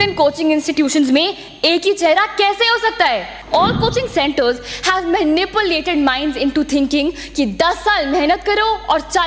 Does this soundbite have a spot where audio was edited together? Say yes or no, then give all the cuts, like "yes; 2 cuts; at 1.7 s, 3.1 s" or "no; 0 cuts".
yes; 1 cut; at 3.3 s